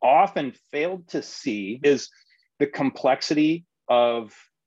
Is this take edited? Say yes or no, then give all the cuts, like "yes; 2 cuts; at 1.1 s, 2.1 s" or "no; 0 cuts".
yes; 1 cut; at 1.7 s